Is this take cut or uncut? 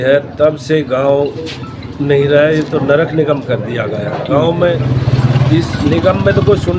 cut